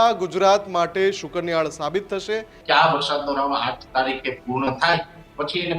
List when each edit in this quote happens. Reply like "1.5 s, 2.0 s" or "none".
2.5 s